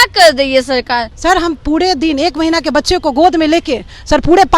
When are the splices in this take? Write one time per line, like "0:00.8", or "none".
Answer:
0:01.1